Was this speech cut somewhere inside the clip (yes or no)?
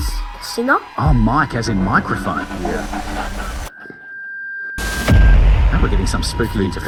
no